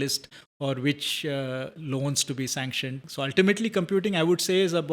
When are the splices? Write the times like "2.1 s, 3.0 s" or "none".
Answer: 3.0 s

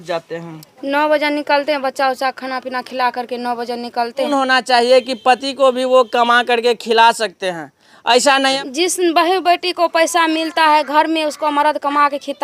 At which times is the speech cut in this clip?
4.3 s, 8.6 s

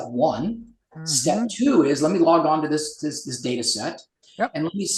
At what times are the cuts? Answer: none

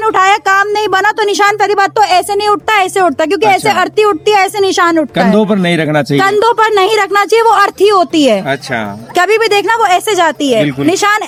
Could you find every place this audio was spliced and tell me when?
none

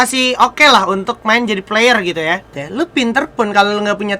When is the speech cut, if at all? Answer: 2.6 s

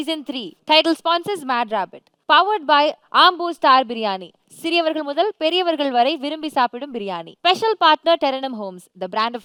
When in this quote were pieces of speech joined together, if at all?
none

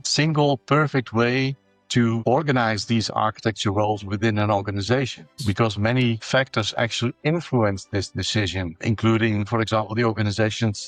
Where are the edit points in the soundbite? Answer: none

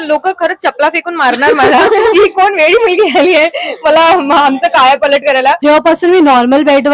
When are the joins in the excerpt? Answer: 5.6 s

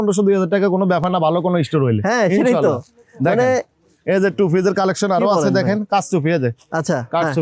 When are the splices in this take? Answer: none

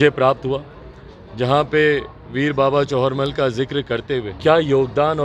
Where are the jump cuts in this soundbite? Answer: 4.3 s

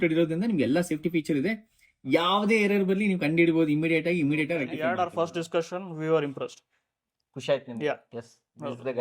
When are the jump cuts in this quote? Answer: 4.7 s

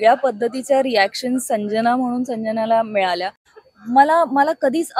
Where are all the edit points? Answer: 3.4 s

